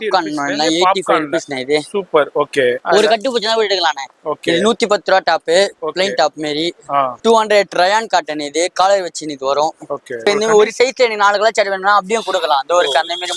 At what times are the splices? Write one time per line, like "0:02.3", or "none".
0:02.8
0:07.2
0:10.3